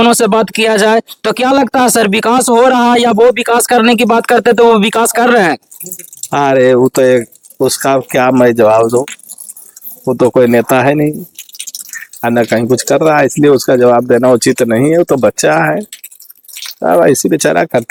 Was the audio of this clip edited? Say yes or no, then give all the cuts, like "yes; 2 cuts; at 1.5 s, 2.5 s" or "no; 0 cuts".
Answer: no; 0 cuts